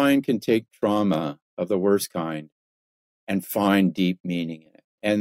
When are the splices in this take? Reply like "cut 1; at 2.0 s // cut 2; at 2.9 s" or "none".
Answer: none

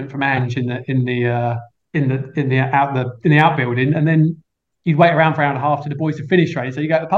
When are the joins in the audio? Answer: cut 1; at 1.7 s

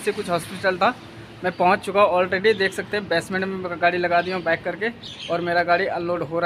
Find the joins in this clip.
none

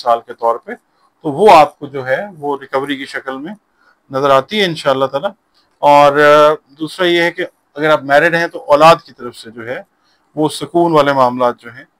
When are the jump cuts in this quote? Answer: none

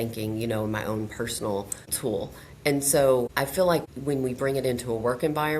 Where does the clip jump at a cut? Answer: cut 1; at 1.9 s // cut 2; at 3.8 s

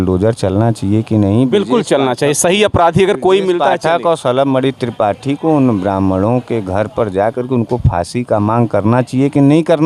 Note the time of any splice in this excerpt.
none

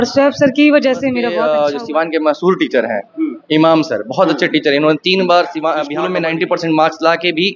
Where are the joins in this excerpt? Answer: cut 1; at 1.3 s // cut 2; at 6.0 s

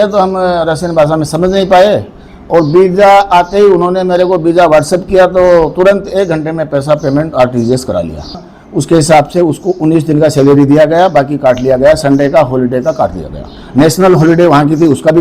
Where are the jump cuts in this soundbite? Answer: cut 1; at 8.5 s

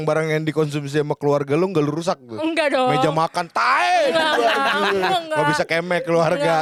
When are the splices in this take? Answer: none

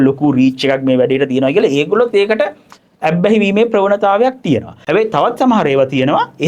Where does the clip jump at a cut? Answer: cut 1; at 4.7 s

